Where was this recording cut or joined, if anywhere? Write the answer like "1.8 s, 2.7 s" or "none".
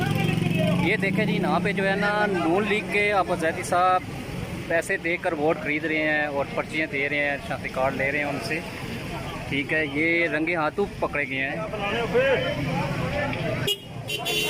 none